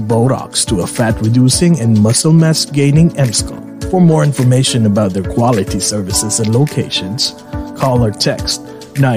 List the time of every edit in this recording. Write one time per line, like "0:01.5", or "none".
none

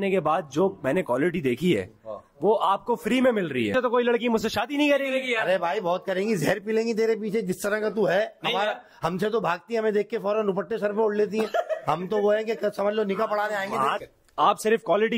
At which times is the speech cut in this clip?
0:03.7
0:14.0

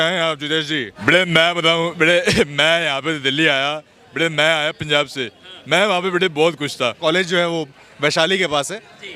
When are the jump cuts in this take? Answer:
0:00.9
0:07.0

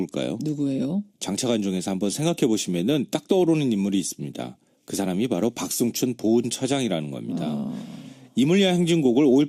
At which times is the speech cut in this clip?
0:02.6

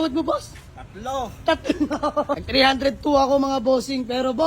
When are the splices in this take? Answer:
0:02.4

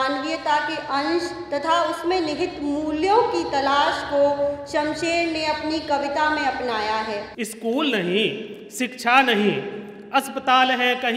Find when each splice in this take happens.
0:07.3

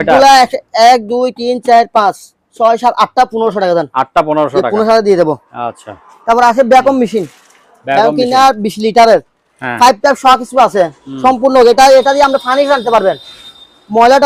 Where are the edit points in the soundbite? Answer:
none

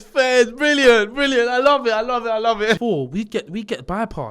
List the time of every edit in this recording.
0:02.8

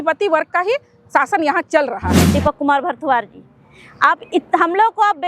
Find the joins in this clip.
0:02.2

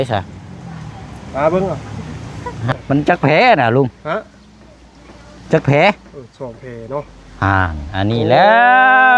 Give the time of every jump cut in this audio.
0:02.7

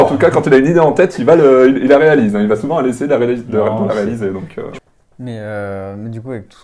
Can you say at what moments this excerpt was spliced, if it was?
0:04.8

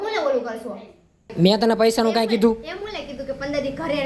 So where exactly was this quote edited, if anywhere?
0:01.3

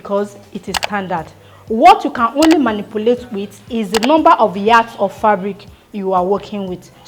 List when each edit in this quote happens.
none

